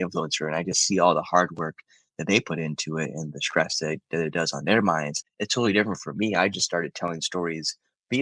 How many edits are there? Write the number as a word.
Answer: one